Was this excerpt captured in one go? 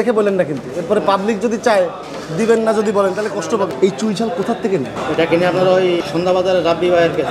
no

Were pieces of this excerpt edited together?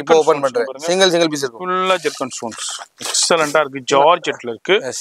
no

